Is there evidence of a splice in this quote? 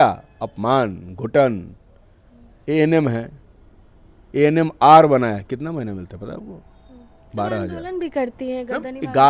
no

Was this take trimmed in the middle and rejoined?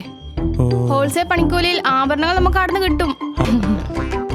yes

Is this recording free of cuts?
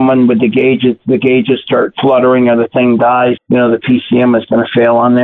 no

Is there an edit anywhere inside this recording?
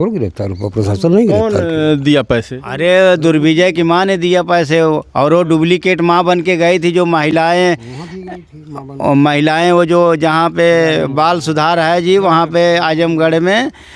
no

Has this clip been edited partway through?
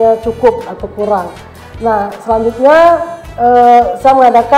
no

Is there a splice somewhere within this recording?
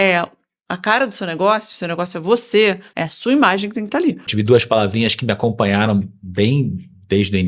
yes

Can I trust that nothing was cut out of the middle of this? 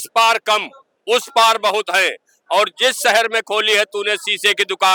yes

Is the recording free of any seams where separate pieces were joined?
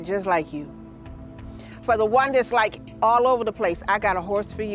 yes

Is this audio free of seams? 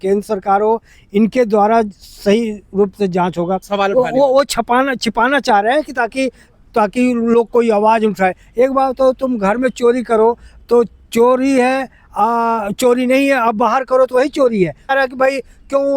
no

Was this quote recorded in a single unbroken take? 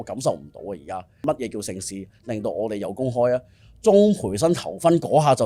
no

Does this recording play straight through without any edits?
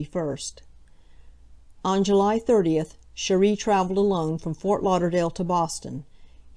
yes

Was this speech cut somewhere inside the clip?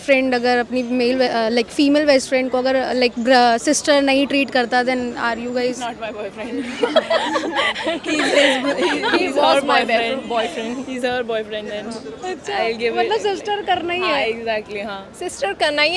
no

